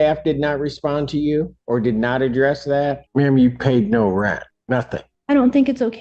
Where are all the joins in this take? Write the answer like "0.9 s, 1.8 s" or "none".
1.6 s, 3.0 s, 4.8 s